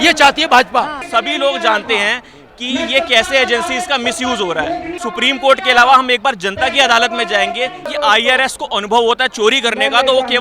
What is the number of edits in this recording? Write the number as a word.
three